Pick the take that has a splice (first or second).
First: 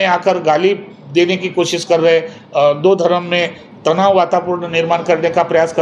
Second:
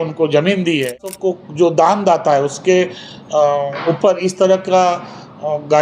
second